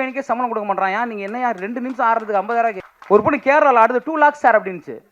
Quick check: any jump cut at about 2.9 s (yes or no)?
yes